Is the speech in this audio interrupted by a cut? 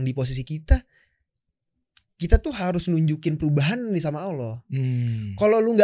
no; 0 cuts

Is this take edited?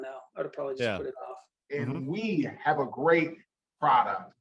yes; 1 cut; at 1.5 s

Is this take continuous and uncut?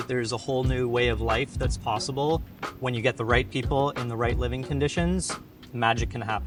yes; 0 cuts

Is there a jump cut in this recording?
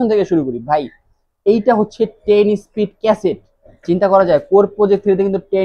no; 0 cuts

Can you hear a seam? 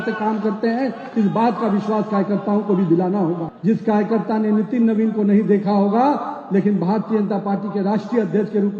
yes; 1 cut; at 3.5 s

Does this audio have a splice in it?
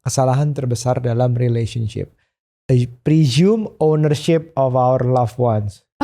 no; 0 cuts

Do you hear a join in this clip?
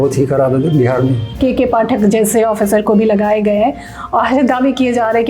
yes; 1 cut; at 1.3 s

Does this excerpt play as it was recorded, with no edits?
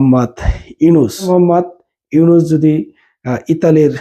no; 1 cut; at 1.3 s

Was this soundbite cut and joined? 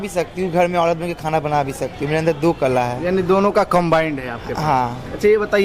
no; 0 cuts

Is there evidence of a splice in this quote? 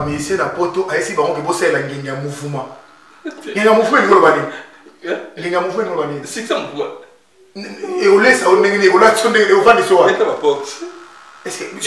no; 0 cuts

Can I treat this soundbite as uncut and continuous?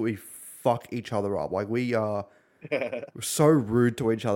yes; 0 cuts

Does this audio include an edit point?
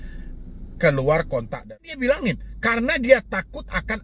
yes; 1 cut; at 1.5 s

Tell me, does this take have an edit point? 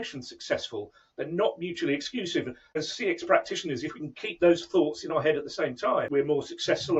yes; 2 cuts; at 2.8 s, 6.1 s

